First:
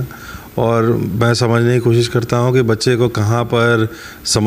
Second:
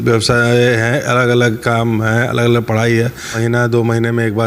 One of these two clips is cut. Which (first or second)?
second